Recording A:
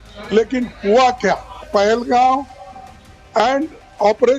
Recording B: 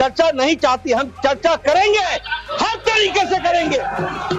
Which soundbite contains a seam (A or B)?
A